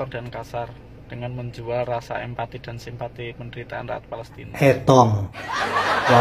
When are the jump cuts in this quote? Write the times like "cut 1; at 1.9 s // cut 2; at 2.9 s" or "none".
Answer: cut 1; at 4.4 s